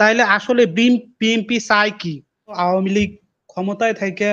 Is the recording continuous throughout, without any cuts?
no; 1 cut; at 2.5 s

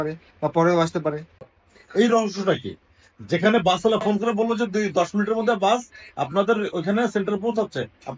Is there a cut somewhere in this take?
yes; 1 cut; at 1.3 s

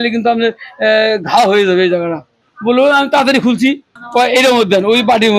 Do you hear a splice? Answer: yes; 2 cuts; at 2.5 s, 4.0 s

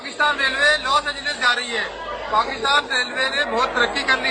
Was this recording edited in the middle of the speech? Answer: no; 0 cuts

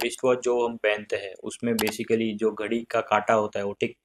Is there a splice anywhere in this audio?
no; 0 cuts

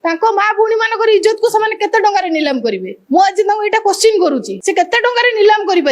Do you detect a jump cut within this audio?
yes; 2 cuts; at 2.9 s, 4.5 s

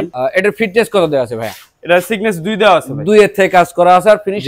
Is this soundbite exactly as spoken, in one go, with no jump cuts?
yes; 0 cuts

